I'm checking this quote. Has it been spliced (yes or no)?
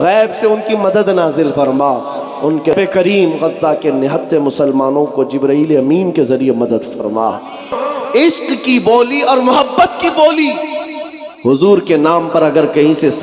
yes